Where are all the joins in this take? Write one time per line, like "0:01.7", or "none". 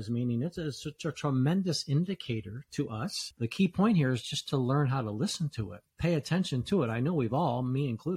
0:03.2